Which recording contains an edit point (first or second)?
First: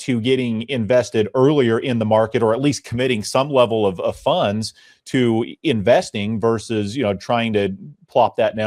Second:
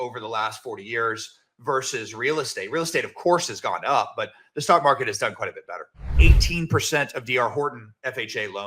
second